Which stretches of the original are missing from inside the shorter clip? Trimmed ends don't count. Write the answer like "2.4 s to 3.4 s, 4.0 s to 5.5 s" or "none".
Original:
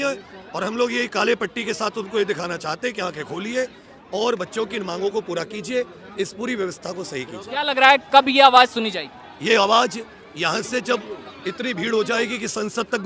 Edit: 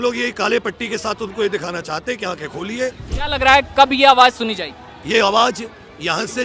3.8 s to 7.4 s